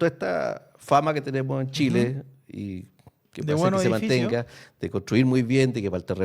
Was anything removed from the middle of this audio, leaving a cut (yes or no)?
no